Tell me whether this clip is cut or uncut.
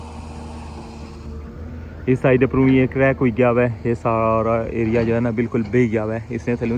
uncut